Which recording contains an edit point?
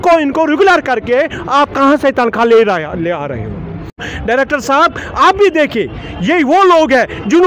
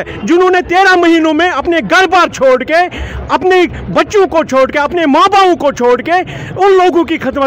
first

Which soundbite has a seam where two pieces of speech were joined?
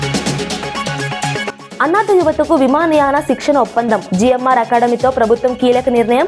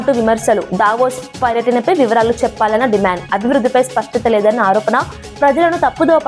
first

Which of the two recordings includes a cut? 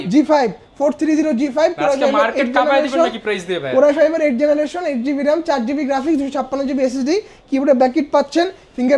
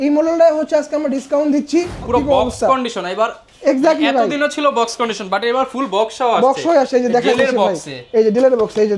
second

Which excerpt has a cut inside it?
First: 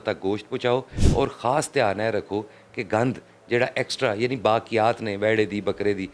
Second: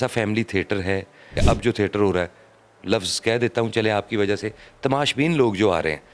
second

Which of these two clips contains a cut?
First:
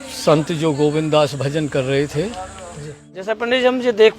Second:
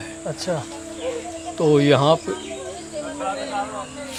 first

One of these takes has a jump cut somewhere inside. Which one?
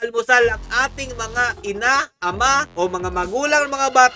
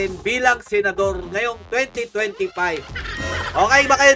second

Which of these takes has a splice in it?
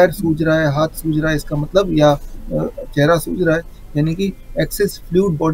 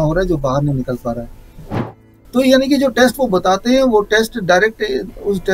second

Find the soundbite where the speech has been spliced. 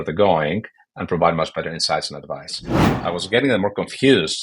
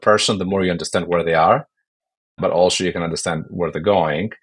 first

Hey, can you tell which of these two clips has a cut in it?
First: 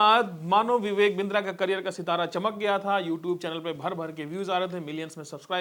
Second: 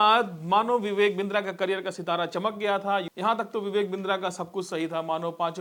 second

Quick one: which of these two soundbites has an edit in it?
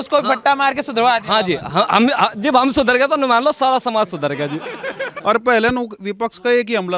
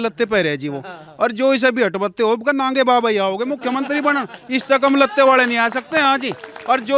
first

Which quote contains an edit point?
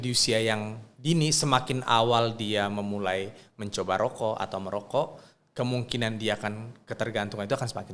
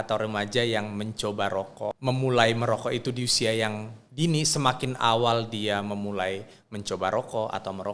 second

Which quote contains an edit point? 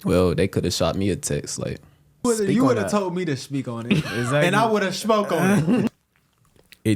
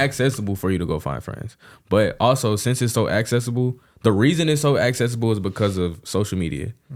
first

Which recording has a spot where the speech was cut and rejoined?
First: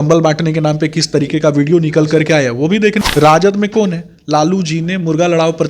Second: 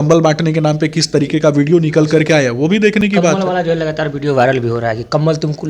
first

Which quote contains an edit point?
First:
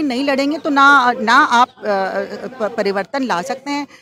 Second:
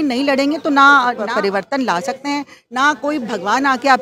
second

